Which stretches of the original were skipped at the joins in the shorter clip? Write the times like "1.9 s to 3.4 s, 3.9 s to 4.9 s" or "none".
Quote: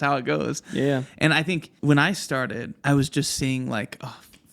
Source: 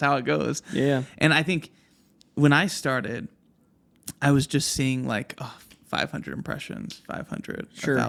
1.7 s to 2.2 s, 3.2 s to 4.1 s